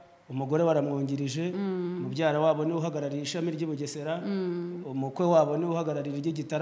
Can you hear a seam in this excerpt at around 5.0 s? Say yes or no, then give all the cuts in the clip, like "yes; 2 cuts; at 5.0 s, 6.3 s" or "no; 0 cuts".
no; 0 cuts